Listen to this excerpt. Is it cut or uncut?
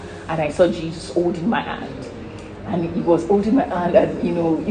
uncut